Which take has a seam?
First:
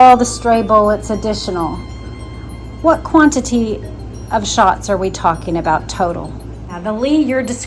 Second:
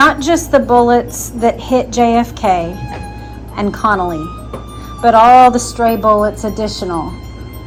first; 1 cut; at 6.7 s

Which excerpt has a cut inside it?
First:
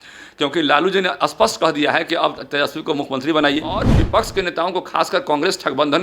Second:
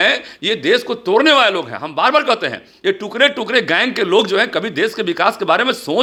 first; 1 cut; at 4.0 s

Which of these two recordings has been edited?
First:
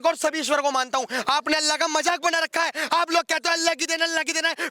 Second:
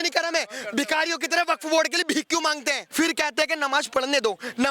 second; 1 cut; at 2.8 s

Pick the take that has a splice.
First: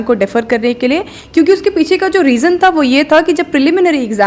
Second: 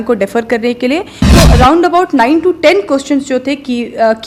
second; 1 cut; at 1.2 s

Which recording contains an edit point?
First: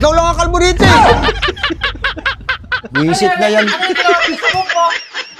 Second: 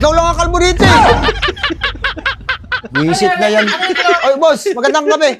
second; 1 cut; at 4.2 s

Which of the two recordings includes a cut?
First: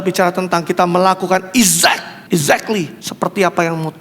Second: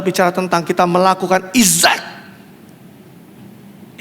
first; 2 cuts; at 2.1 s, 3.0 s

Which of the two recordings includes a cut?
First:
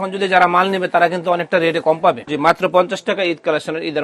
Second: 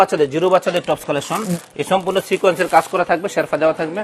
first; 1 cut; at 2.3 s

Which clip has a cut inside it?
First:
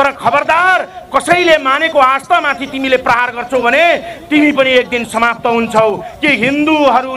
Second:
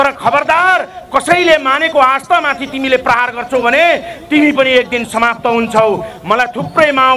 first; 1 cut; at 6.1 s

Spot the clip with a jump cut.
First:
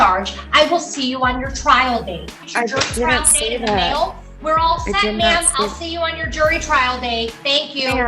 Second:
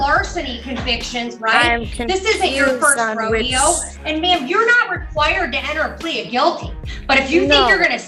first; 1 cut; at 2.4 s

